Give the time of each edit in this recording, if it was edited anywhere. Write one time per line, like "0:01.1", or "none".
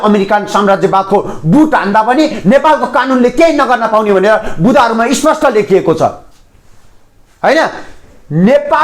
none